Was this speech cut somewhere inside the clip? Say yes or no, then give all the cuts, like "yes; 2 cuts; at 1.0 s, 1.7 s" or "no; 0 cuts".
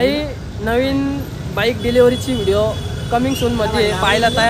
no; 0 cuts